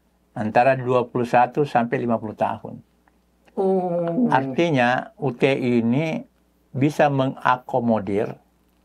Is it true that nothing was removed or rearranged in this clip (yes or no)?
yes